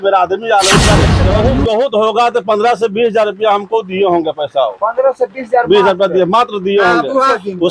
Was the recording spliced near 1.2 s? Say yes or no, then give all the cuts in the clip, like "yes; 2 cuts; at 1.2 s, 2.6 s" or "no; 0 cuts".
yes; 1 cut; at 1.2 s